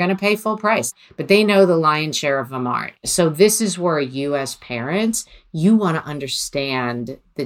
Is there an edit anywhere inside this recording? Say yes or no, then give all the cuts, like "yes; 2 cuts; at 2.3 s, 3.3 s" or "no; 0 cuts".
yes; 2 cuts; at 1.0 s, 3.0 s